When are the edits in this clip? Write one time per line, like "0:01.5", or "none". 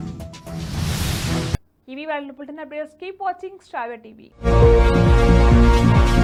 none